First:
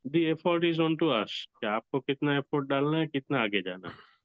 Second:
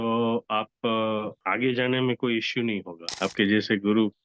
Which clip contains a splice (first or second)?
second